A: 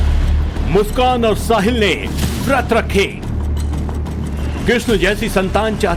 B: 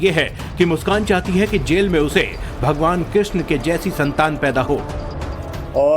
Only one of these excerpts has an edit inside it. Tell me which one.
B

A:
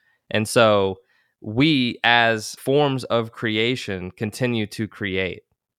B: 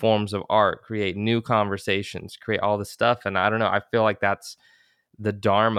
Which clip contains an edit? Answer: A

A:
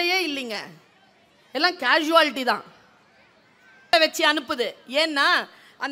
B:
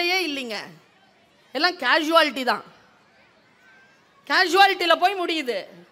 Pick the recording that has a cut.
A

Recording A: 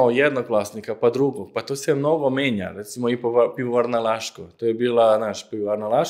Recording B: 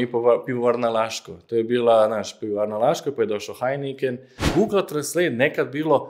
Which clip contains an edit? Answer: B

